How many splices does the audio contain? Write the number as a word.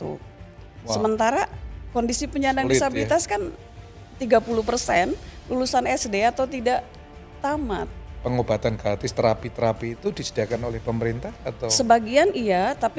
one